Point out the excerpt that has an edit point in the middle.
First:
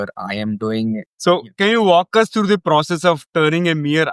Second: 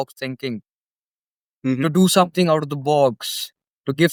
first; 1 cut; at 1.1 s

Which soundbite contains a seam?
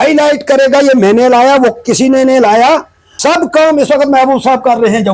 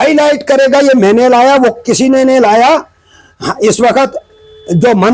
first; 1 cut; at 3.1 s

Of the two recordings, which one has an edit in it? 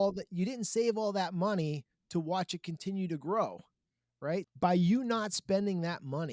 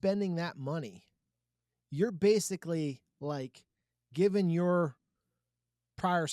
first; 1 cut; at 4.5 s

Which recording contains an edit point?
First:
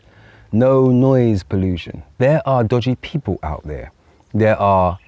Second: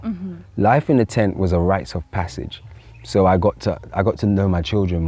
first; 1 cut; at 2.0 s

